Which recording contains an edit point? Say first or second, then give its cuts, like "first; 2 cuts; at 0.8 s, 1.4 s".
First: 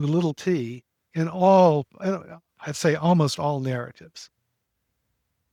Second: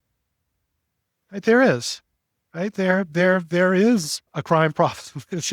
second; 1 cut; at 4.3 s